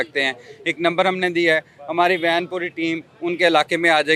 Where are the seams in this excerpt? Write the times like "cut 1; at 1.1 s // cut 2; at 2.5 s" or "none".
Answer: none